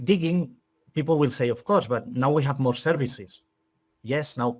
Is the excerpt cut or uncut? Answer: uncut